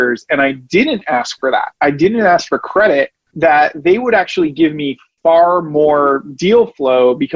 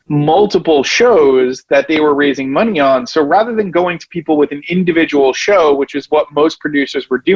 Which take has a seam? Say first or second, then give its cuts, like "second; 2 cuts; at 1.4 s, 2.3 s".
first; 1 cut; at 3.2 s